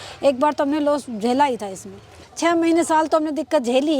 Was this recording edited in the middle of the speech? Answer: yes; 1 cut; at 2.2 s

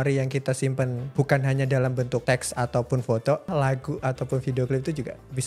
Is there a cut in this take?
yes; 3 cuts; at 1.0 s, 2.2 s, 3.5 s

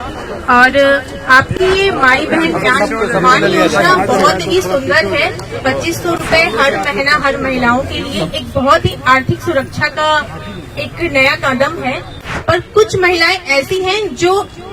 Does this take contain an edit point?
yes; 1 cut; at 12.3 s

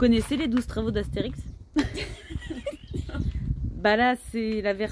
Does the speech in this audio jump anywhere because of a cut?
no; 0 cuts

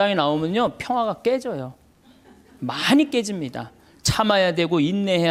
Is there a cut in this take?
no; 0 cuts

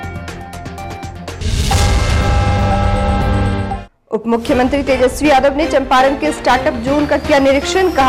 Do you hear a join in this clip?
yes; 1 cut; at 3.9 s

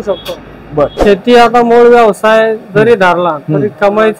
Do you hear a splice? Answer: yes; 1 cut; at 0.9 s

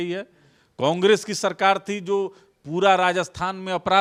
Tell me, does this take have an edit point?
no; 0 cuts

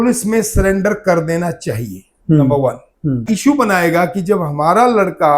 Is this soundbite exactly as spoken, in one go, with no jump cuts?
no; 1 cut; at 3.2 s

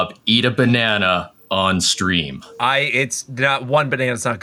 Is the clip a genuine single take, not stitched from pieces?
yes; 0 cuts

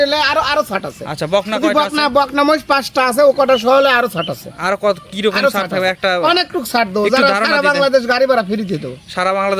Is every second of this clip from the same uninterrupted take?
yes; 0 cuts

